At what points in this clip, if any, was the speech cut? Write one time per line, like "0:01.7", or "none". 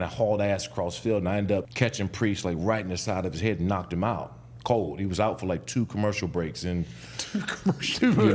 0:01.7

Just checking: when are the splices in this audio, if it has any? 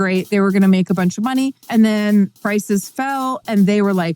0:01.6
0:02.4

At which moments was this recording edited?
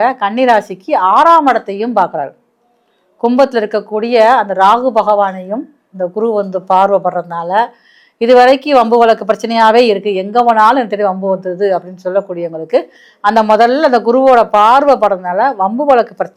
none

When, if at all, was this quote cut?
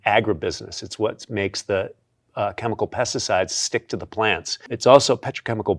0:04.7

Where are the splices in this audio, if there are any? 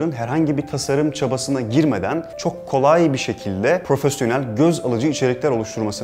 0:02.3
0:03.8

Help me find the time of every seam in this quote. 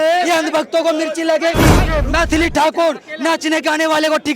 0:01.8

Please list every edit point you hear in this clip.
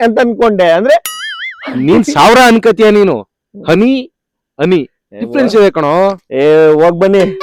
none

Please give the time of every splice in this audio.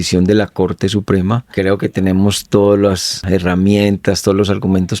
0:01.5
0:03.1

